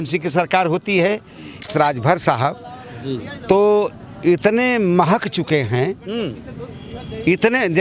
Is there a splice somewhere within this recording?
yes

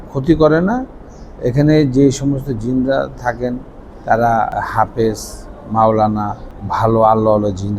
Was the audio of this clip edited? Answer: yes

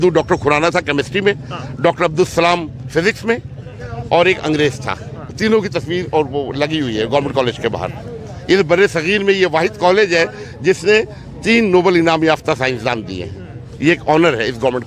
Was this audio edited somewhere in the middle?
no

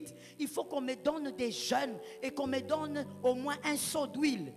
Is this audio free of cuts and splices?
yes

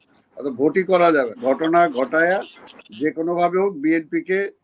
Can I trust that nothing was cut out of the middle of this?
no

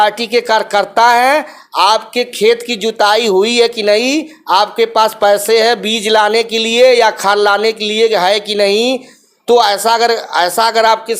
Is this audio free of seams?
yes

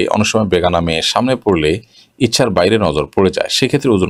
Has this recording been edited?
no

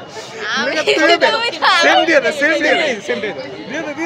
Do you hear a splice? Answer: no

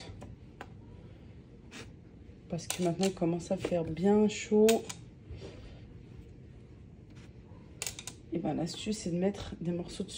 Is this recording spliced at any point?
no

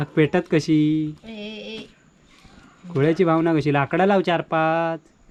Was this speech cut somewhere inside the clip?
no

